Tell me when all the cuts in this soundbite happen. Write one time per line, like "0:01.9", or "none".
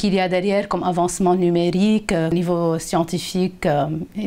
0:02.3